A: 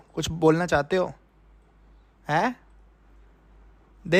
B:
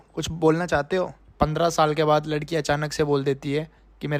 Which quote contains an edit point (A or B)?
B